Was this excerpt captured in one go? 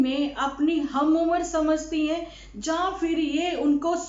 yes; 0 cuts

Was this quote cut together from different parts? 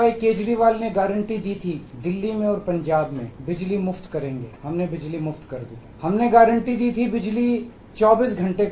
yes; 4 cuts; at 1.9 s, 3.3 s, 4.5 s, 5.8 s

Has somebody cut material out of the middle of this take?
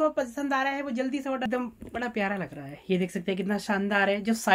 yes; 1 cut; at 1.5 s

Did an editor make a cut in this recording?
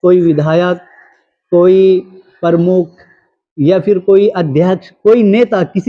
no; 0 cuts

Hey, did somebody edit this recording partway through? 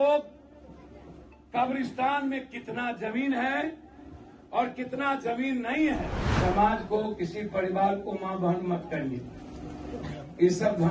yes; 1 cut; at 6.2 s

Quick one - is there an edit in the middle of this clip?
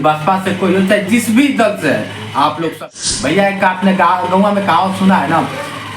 yes; 1 cut; at 2.8 s

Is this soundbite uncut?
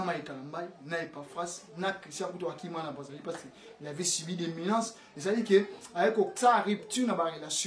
yes; 0 cuts

